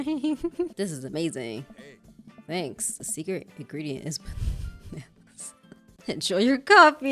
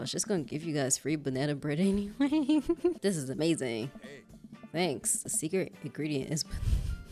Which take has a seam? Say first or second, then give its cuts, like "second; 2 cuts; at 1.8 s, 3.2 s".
first; 1 cut; at 6.0 s